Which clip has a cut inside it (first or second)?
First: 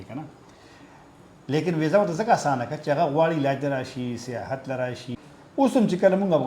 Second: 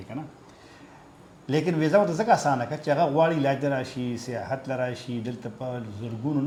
first